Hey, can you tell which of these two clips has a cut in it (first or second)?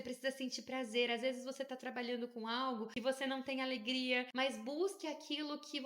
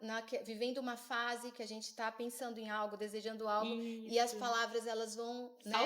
first